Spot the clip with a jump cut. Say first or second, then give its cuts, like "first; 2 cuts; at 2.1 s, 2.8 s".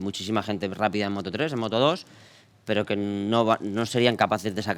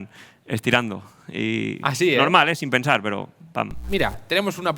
second; 1 cut; at 3.8 s